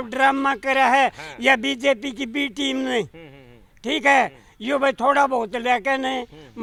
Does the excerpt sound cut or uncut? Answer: uncut